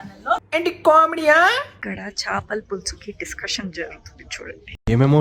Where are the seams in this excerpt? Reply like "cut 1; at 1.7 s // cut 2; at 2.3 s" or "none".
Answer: cut 1; at 1.7 s